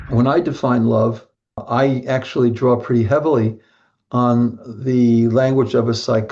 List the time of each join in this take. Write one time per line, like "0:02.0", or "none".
0:01.6